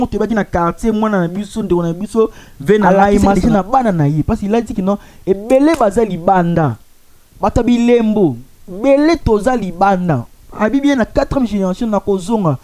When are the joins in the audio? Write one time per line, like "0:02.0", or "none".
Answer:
0:03.4